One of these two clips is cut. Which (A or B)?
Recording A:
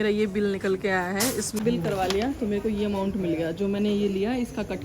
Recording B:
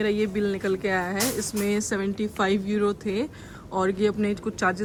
A